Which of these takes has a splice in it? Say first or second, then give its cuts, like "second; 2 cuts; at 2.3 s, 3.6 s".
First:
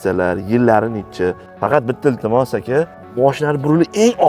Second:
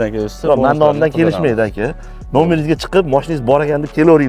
first; 2 cuts; at 1.5 s, 3.0 s